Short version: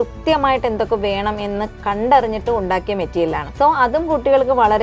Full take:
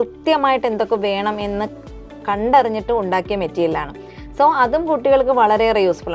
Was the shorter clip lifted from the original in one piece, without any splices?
no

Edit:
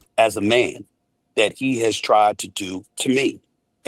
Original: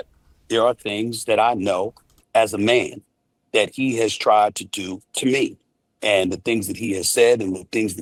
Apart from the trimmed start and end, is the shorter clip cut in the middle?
no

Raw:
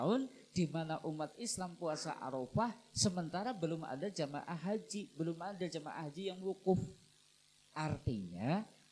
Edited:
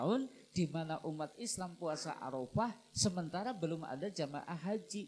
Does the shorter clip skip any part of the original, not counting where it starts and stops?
no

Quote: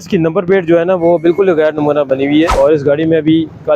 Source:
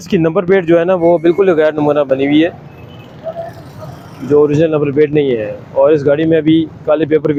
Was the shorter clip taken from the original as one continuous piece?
no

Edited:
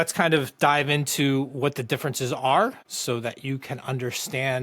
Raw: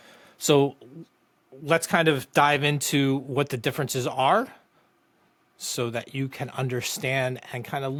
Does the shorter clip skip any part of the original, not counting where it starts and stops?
yes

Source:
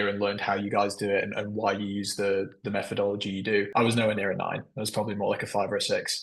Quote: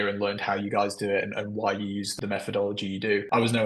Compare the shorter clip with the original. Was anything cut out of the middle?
yes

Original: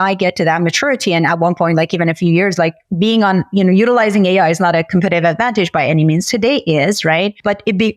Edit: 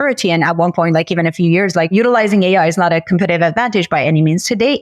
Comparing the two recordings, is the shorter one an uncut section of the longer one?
no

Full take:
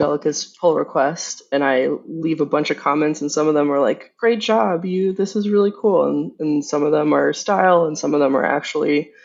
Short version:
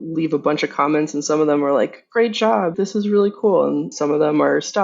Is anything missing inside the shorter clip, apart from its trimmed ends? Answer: yes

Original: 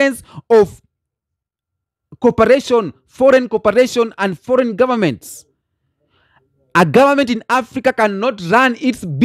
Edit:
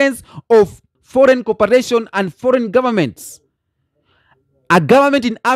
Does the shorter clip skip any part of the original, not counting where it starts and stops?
yes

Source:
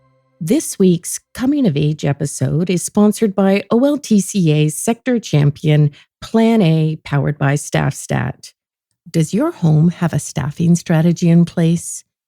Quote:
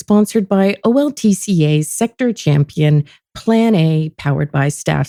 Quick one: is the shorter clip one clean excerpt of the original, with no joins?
yes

